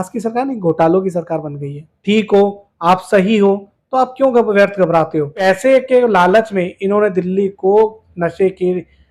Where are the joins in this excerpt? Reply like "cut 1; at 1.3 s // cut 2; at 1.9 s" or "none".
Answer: cut 1; at 1.9 s // cut 2; at 5.4 s

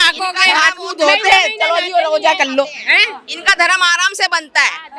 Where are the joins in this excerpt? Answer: none

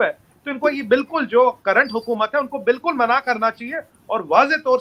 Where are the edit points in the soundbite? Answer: none

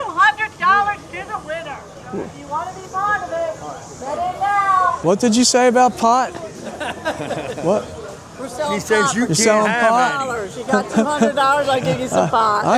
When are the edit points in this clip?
cut 1; at 5.0 s

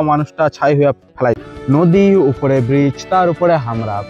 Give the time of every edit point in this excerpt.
cut 1; at 1.4 s

